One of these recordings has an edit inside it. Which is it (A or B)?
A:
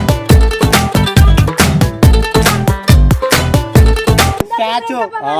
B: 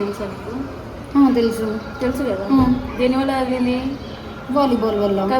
A